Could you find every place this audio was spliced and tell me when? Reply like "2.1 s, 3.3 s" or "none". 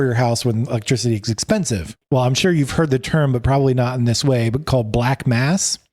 1.9 s